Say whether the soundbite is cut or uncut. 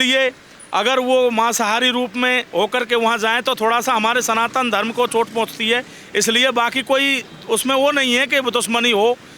uncut